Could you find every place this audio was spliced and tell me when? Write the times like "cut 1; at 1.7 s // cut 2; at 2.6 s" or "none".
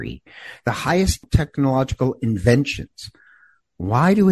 cut 1; at 1.2 s